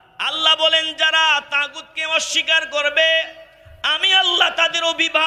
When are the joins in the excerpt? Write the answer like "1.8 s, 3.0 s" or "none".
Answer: none